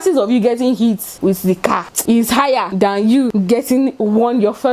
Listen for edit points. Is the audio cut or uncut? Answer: cut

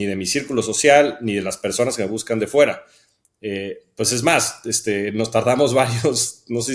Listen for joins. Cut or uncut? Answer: uncut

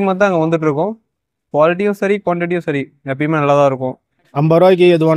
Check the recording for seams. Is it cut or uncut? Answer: cut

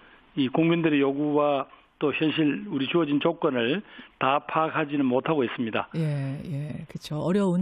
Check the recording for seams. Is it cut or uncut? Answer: cut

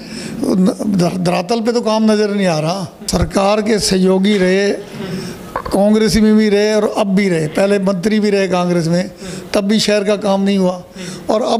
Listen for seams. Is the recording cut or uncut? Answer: cut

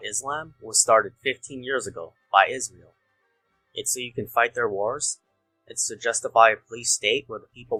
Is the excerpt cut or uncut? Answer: uncut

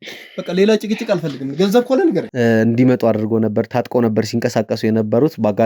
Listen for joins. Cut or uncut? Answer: cut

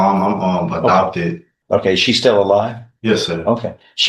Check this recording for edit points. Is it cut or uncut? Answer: cut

